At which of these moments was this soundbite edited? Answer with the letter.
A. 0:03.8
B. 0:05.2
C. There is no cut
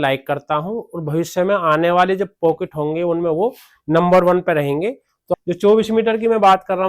B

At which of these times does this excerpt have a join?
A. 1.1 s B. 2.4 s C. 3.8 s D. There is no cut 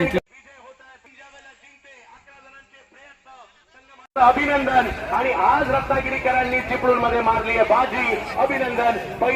A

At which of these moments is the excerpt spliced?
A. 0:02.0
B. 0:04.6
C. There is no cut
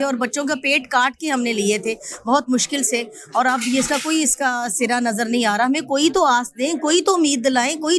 C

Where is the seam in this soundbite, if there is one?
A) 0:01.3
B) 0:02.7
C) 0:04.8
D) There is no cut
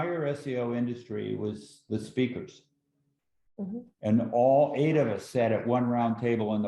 D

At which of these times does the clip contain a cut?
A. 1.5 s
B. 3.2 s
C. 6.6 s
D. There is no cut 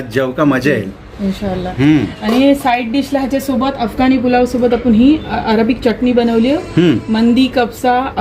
D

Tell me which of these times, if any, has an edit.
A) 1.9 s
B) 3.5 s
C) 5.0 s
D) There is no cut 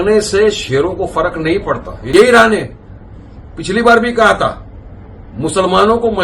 A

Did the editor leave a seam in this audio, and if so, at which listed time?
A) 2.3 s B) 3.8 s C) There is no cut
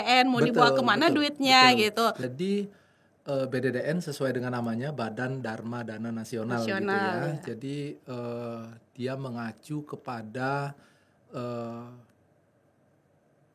A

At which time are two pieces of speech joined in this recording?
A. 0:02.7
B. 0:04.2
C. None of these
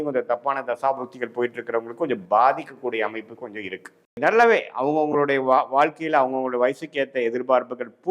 B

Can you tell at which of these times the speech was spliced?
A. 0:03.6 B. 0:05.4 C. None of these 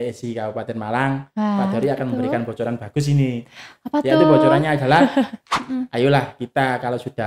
B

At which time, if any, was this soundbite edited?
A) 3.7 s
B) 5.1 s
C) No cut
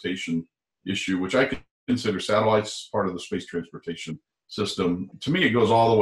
B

